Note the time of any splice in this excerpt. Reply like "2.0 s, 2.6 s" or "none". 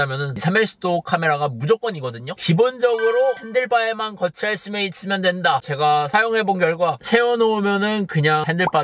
2.3 s